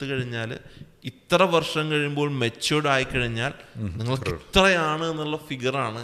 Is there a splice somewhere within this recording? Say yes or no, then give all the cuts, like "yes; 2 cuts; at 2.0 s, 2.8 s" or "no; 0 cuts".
no; 0 cuts